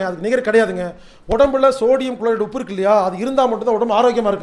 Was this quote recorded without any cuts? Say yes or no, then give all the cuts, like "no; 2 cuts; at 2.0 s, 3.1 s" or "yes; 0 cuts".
yes; 0 cuts